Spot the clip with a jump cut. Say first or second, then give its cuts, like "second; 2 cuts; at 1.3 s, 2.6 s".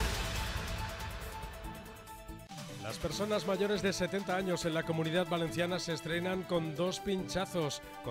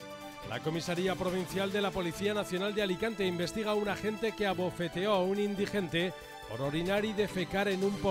first; 1 cut; at 2.4 s